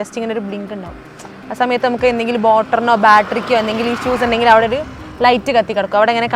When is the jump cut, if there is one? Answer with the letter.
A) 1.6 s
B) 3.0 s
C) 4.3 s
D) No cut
D